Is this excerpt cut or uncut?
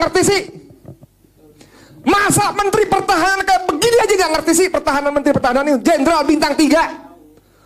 uncut